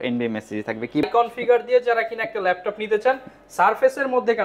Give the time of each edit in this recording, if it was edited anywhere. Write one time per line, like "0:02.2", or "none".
0:01.0